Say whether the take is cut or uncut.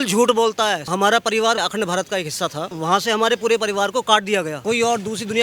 cut